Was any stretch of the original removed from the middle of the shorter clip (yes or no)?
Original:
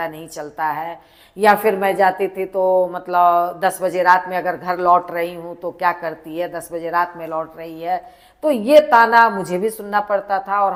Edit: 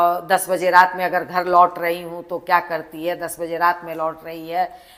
no